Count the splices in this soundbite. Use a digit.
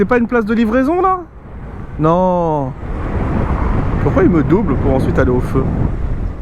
1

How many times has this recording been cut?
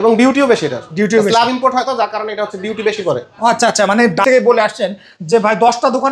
1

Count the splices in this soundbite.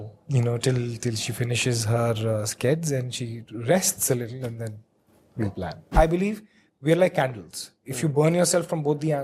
1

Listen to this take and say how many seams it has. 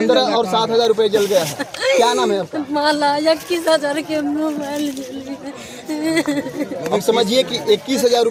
0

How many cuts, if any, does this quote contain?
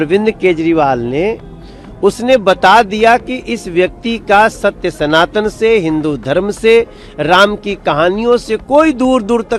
0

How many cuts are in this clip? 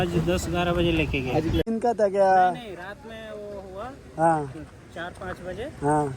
1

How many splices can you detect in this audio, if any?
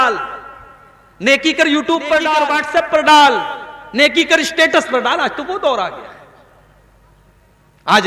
1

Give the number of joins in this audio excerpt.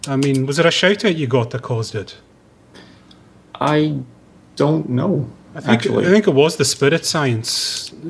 1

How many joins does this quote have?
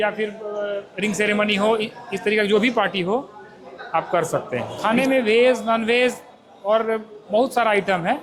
1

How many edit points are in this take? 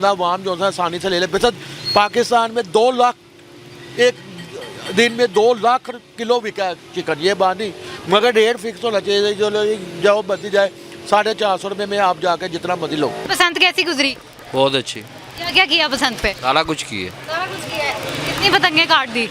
0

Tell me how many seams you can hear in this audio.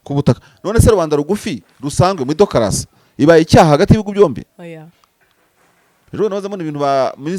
0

